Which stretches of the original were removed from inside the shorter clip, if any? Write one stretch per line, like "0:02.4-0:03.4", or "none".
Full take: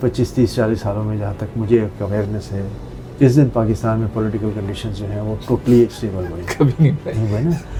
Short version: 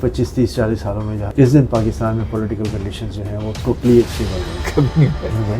0:01.2-0:03.0